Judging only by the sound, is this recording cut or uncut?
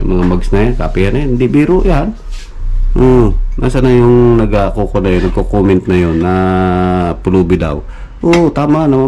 uncut